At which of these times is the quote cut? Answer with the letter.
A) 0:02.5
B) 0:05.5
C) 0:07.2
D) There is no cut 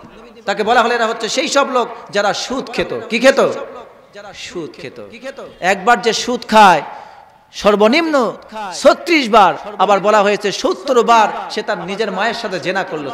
D